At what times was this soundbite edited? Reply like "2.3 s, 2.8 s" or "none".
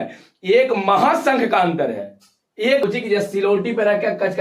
2.8 s